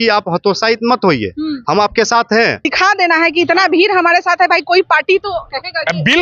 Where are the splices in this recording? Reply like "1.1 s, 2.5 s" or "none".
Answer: 2.7 s